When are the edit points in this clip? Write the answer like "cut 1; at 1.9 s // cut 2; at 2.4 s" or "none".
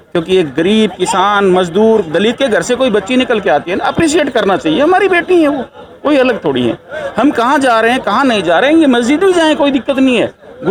none